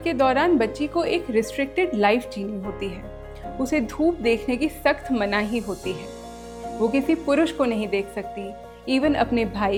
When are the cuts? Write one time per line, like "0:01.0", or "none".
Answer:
none